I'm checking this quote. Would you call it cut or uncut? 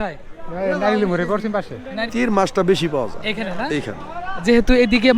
cut